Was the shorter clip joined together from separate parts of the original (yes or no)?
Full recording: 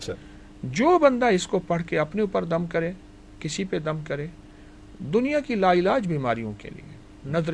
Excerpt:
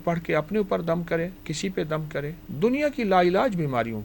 yes